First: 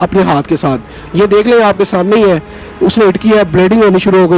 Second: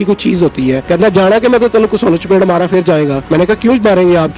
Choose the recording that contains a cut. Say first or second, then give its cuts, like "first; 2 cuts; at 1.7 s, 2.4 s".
second; 2 cuts; at 0.8 s, 3.2 s